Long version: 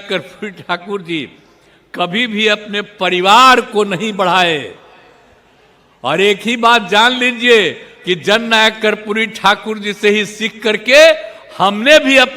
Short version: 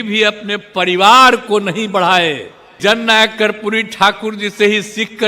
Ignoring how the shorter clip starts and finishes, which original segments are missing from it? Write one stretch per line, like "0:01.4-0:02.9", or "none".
0:05.0-0:08.2